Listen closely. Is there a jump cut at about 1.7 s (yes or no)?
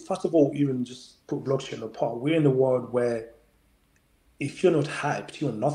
no